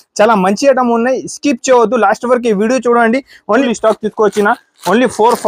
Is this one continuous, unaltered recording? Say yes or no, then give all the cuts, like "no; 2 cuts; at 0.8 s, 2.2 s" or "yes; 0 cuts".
no; 1 cut; at 3.6 s